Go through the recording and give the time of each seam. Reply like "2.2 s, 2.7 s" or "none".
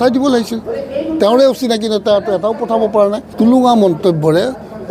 3.2 s